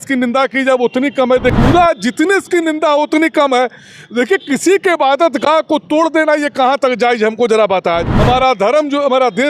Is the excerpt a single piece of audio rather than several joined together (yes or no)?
no